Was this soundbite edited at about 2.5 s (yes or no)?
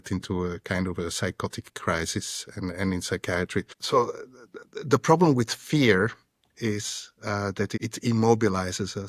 no